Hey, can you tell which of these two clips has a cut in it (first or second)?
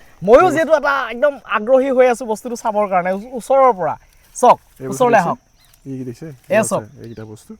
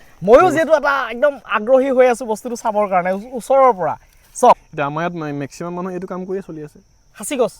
second